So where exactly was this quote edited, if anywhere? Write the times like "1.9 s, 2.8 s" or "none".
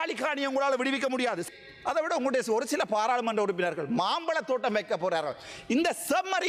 1.5 s